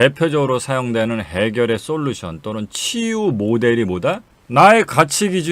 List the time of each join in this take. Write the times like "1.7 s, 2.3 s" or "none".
4.3 s